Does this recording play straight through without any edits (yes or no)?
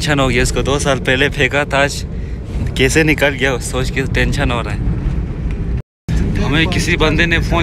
yes